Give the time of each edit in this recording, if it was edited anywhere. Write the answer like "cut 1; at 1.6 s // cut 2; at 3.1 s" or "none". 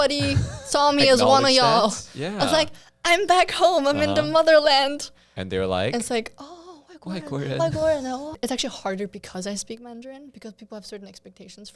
cut 1; at 8.4 s